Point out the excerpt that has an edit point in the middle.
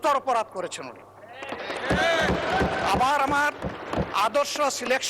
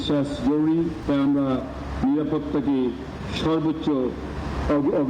second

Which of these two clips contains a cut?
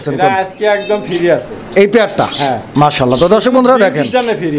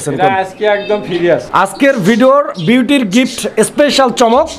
second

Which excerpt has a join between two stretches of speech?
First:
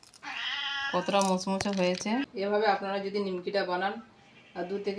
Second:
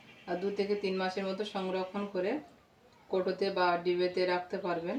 first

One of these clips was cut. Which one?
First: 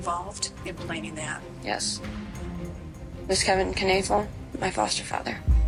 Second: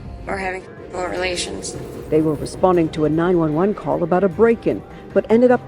second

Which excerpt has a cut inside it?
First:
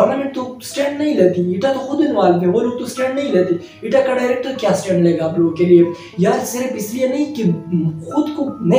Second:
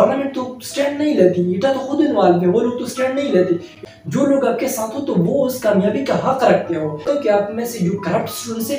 second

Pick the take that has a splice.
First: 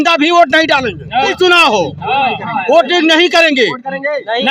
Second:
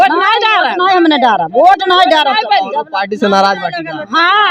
first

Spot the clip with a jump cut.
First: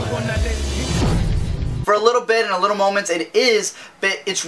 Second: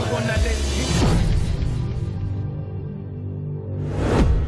second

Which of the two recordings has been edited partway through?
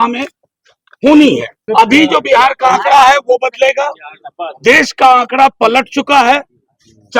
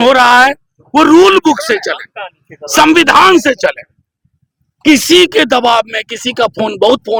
first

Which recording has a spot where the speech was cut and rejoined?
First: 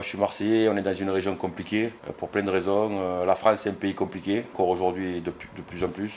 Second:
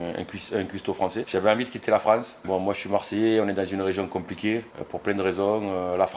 second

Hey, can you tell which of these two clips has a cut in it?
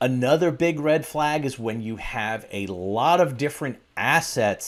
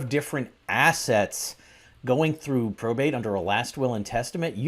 second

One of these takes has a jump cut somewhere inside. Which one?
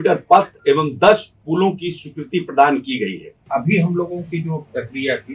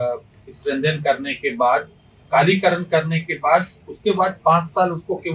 first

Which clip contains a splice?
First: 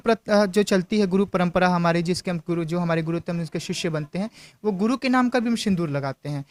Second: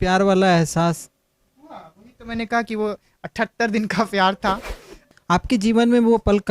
second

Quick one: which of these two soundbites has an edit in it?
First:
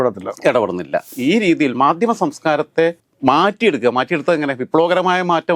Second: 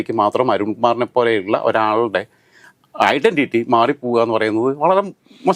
first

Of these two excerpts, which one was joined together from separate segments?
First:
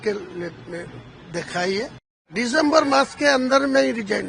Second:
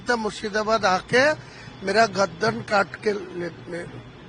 first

